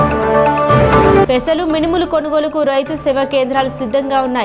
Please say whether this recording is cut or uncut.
cut